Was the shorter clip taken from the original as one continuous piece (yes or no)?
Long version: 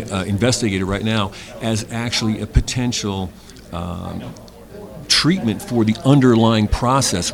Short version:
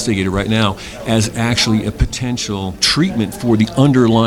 no